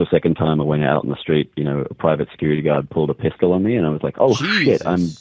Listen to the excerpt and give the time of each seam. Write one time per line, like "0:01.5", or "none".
none